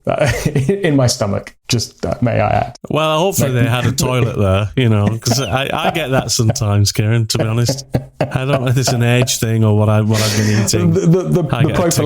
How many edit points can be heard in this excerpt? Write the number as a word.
one